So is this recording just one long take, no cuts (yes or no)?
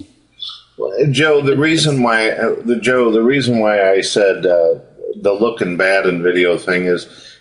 yes